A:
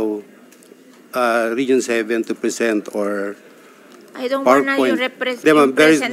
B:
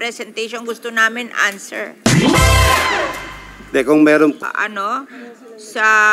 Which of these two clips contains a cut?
B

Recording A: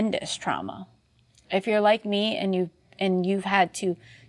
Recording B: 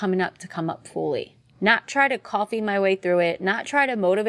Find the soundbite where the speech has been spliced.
B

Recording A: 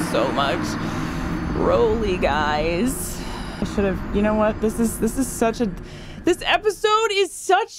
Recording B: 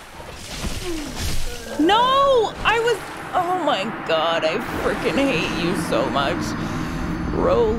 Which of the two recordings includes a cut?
A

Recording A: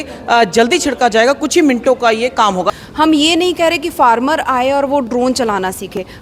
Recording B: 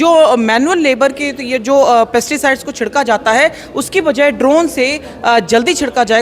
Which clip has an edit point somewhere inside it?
A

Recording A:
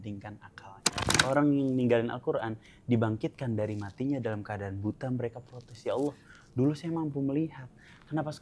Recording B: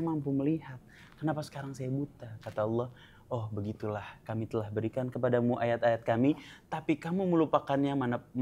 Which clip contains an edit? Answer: A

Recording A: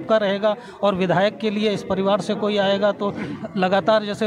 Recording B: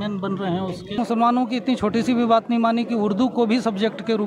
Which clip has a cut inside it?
B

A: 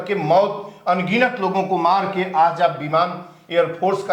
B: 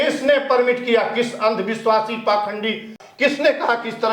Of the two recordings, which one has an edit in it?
B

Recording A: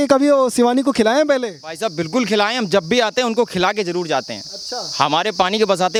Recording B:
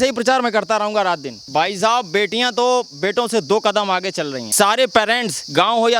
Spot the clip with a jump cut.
B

